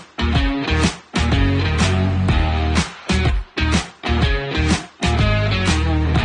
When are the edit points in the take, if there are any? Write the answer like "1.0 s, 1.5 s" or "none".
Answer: none